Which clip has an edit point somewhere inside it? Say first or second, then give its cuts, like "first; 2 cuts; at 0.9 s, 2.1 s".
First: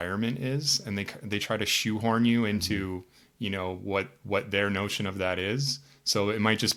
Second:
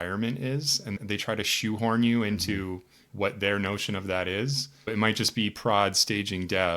second; 3 cuts; at 1.0 s, 3.0 s, 4.9 s